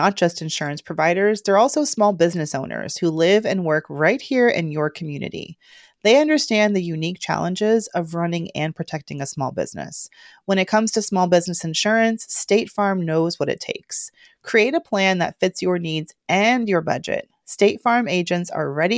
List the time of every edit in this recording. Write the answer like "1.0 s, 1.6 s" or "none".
none

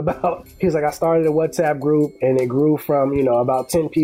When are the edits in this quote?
none

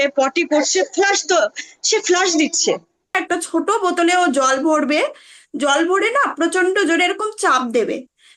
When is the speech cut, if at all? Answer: 3.2 s

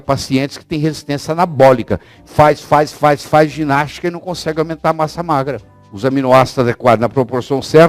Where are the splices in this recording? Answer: 5.8 s

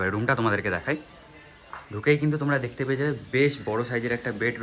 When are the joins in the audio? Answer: none

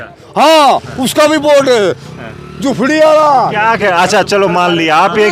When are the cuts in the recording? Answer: none

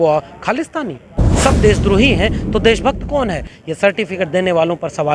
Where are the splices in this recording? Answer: 1.3 s

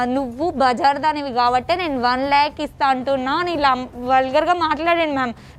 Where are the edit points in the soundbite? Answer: none

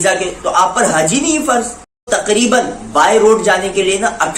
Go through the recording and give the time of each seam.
2.1 s

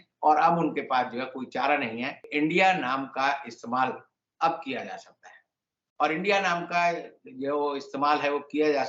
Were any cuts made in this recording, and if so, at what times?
2.3 s

